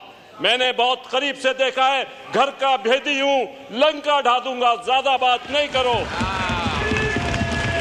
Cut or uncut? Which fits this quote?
uncut